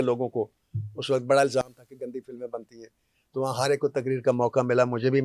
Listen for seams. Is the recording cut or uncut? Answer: uncut